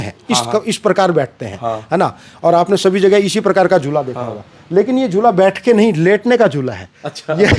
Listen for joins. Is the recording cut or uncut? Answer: uncut